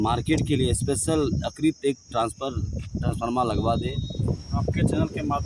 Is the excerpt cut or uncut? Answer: cut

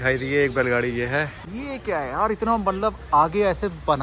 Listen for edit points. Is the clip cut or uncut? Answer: cut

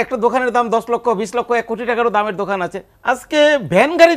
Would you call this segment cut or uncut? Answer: cut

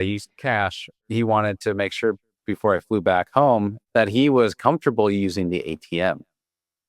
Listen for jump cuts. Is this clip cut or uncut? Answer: cut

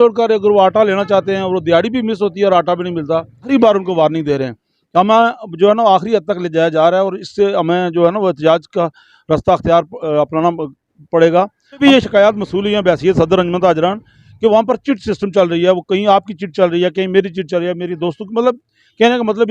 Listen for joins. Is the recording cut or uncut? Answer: cut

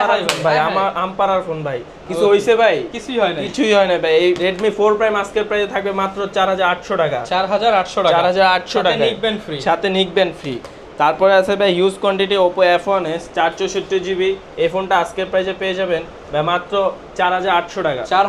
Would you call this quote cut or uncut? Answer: uncut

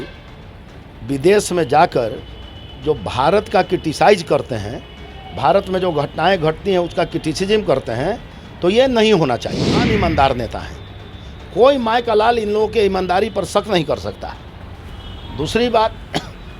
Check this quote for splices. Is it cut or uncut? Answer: cut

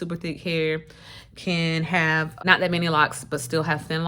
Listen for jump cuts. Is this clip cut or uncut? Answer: cut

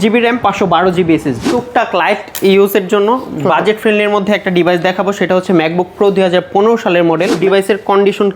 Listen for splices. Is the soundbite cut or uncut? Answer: cut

